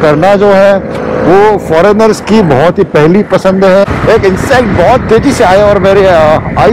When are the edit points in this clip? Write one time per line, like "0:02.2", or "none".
0:03.9